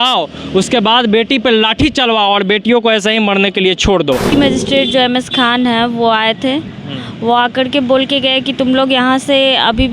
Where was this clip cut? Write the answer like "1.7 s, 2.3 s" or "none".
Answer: 4.3 s